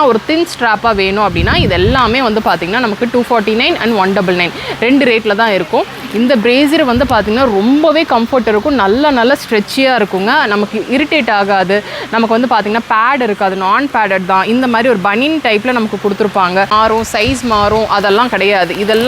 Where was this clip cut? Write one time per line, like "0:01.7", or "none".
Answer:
0:16.7

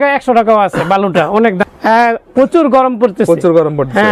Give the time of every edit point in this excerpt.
0:01.6

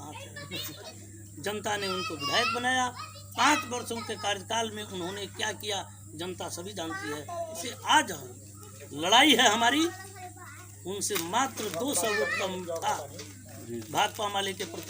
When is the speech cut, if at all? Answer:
0:00.9
0:07.6

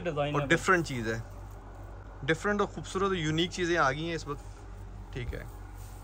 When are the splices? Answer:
none

